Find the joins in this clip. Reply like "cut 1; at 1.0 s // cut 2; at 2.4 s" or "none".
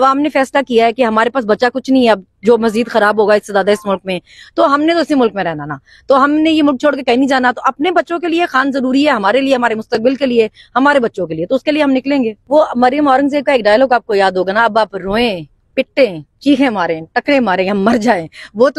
cut 1; at 12.4 s